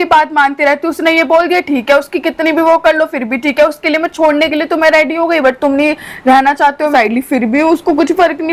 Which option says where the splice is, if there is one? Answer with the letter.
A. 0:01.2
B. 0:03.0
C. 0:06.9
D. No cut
C